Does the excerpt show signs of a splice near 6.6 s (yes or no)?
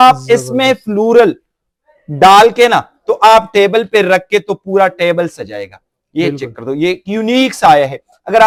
no